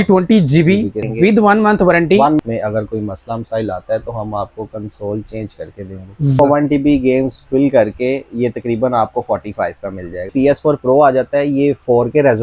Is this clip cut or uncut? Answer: cut